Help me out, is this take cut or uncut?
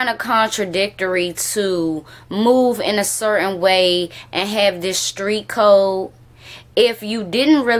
uncut